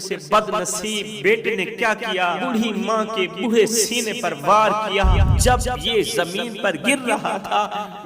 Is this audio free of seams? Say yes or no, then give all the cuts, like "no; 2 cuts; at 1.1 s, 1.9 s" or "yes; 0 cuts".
no; 3 cuts; at 1.1 s, 2.4 s, 5.3 s